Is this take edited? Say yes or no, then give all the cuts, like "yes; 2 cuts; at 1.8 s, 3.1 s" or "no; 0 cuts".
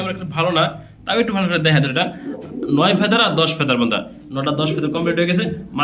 yes; 1 cut; at 1.9 s